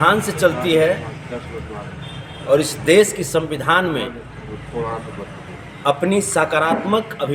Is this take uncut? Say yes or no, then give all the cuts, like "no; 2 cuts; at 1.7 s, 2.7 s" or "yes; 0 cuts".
yes; 0 cuts